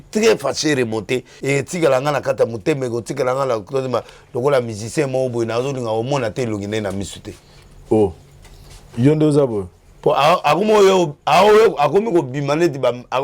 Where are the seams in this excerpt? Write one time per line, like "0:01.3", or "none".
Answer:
0:01.3